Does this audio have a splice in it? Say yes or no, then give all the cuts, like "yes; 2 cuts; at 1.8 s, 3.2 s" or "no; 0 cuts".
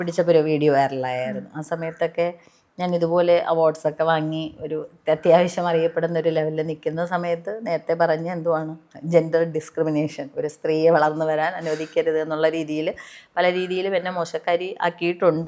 no; 0 cuts